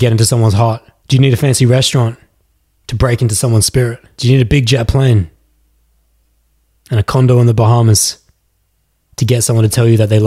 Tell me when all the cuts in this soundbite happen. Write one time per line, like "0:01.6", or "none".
0:00.9
0:04.1